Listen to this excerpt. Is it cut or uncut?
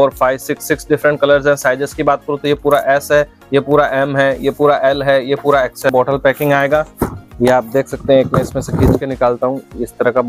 cut